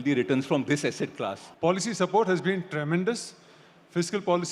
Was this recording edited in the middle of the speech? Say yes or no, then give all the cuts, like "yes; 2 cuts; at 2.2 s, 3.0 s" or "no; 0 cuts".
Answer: yes; 1 cut; at 1.4 s